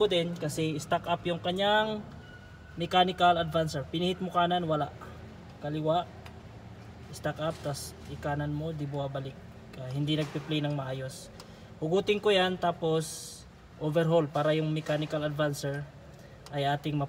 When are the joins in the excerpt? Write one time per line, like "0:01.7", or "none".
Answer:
none

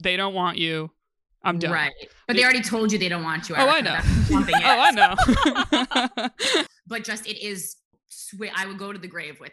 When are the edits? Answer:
0:06.7

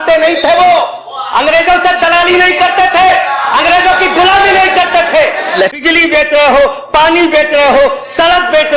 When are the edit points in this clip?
0:05.8

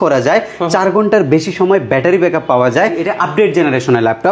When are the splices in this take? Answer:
0:03.1

